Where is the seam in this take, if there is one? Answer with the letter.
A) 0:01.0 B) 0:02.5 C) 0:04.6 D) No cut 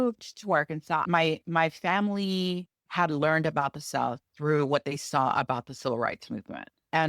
A